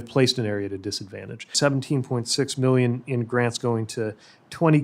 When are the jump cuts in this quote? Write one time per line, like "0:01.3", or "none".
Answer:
0:01.5